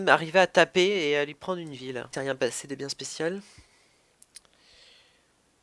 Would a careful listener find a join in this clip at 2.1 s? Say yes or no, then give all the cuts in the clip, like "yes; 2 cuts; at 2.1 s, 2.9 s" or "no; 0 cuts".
no; 0 cuts